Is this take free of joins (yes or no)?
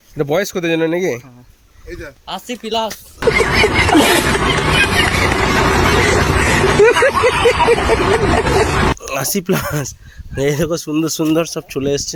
yes